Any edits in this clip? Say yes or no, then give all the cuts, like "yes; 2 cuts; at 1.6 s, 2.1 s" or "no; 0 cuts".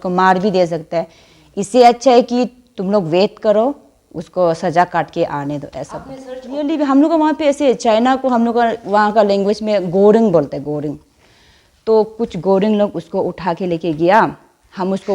yes; 1 cut; at 6.7 s